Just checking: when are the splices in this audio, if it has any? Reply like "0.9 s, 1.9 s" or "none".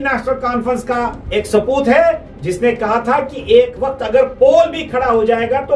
1.2 s